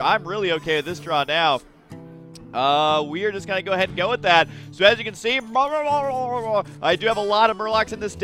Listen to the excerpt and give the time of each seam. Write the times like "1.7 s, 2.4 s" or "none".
6.0 s